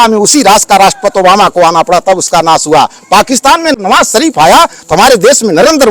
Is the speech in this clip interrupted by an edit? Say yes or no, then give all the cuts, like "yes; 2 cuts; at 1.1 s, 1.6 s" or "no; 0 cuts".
yes; 1 cut; at 3.8 s